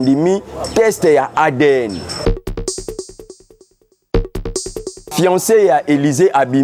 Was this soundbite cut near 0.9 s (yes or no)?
no